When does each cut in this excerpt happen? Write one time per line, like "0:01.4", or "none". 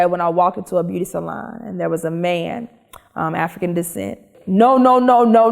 0:04.4